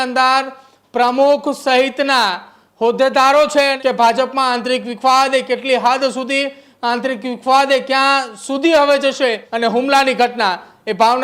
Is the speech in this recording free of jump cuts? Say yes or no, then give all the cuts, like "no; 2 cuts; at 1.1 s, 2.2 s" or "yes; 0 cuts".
no; 2 cuts; at 3.8 s, 9.5 s